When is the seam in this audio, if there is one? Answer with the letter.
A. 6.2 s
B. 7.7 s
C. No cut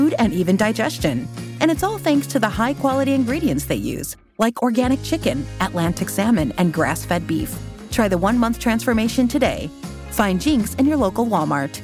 C